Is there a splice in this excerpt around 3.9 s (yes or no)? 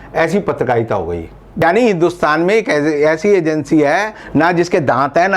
no